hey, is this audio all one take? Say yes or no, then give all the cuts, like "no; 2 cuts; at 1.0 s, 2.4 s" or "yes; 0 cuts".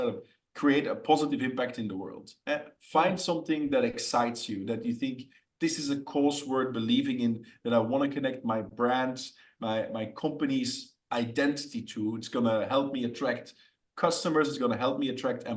yes; 0 cuts